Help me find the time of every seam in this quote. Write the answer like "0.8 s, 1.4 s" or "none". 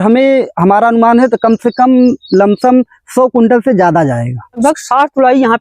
4.6 s